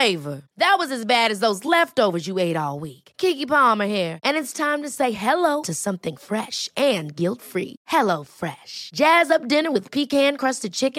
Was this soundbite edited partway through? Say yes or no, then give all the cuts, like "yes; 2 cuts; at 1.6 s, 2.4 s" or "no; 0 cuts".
no; 0 cuts